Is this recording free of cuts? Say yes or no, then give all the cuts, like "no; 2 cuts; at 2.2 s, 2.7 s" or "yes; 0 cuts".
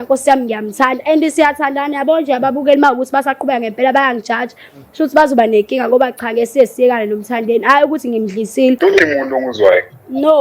no; 1 cut; at 8.8 s